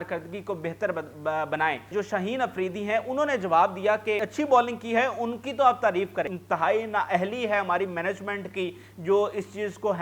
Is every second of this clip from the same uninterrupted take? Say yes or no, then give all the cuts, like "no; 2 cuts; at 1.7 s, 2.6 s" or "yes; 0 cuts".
no; 3 cuts; at 1.9 s, 4.3 s, 6.4 s